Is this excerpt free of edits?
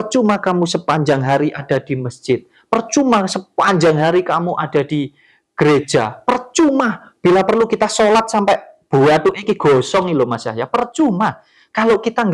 yes; 0 cuts

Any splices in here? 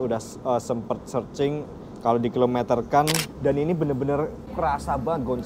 yes; 2 cuts; at 3.3 s, 4.5 s

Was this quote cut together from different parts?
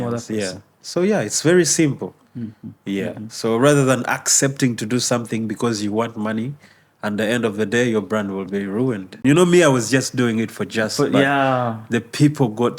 yes; 1 cut; at 9.2 s

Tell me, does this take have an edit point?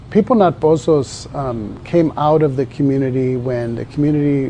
no; 0 cuts

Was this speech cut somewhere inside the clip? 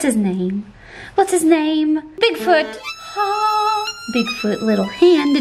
yes; 1 cut; at 2.2 s

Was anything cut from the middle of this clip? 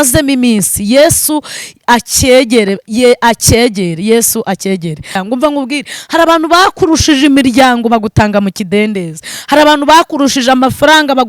yes; 1 cut; at 5.2 s

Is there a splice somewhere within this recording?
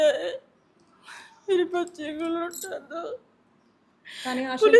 no; 0 cuts

